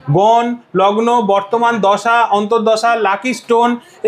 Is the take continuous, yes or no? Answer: yes